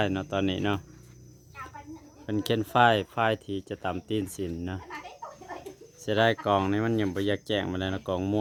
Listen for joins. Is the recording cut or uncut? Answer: uncut